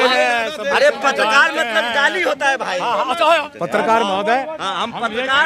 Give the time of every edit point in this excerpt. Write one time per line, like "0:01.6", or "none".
0:03.2

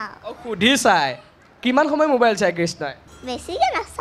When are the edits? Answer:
0:03.1

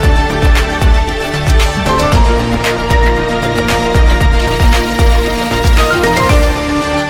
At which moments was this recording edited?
none

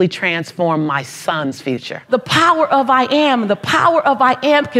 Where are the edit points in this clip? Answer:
0:02.0

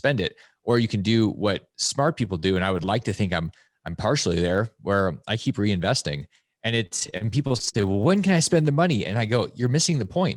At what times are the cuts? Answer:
none

